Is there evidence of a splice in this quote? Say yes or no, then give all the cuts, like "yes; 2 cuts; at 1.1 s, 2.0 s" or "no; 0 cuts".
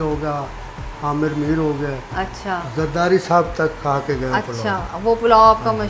no; 0 cuts